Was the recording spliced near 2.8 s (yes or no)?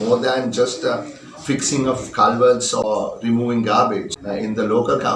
yes